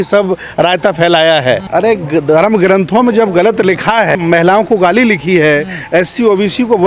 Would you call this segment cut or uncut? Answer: cut